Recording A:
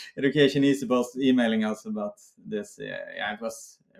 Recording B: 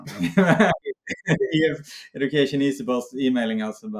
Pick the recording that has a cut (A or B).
B